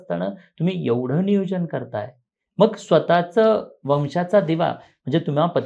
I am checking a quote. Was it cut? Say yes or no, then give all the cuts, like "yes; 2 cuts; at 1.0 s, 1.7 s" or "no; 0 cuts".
no; 0 cuts